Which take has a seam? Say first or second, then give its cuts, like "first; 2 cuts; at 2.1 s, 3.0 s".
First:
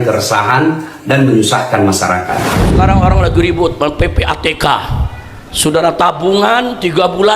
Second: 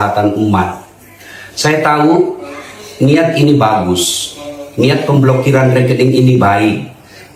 first; 1 cut; at 2.9 s